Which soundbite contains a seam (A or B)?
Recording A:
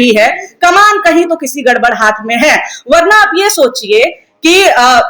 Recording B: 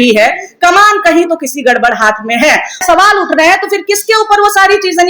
B